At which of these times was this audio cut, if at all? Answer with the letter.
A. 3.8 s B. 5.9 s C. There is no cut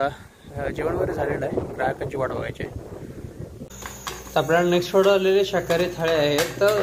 A